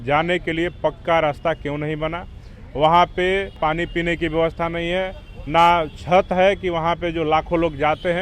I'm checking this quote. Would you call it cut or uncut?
cut